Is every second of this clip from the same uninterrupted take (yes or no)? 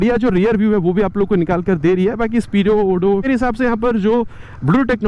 no